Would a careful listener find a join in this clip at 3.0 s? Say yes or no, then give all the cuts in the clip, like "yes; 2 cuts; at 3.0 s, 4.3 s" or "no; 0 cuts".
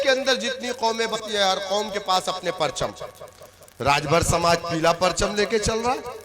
no; 1 cut; at 1.2 s